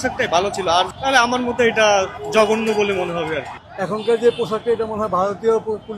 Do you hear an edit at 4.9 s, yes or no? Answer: no